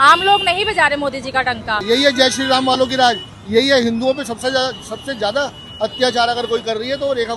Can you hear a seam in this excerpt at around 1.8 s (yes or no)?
yes